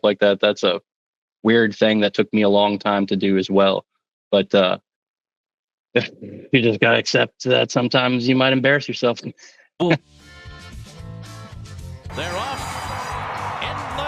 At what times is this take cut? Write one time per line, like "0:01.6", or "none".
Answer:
0:10.0